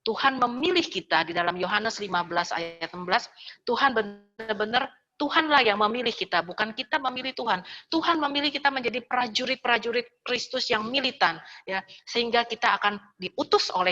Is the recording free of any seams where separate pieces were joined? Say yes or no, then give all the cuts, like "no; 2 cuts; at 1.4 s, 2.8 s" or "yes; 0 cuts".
yes; 0 cuts